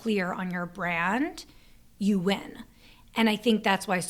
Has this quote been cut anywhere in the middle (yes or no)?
no